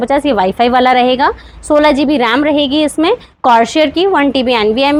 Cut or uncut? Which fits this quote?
uncut